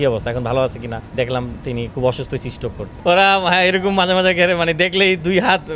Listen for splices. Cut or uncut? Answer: cut